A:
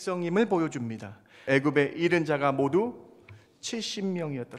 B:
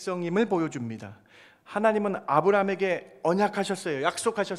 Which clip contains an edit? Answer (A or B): A